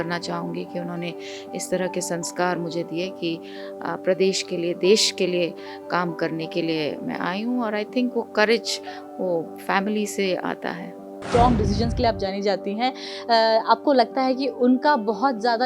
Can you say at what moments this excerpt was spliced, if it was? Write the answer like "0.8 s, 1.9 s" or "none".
11.2 s